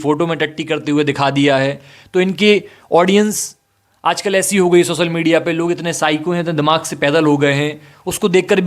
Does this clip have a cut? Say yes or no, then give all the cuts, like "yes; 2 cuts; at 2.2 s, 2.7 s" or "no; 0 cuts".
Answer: no; 0 cuts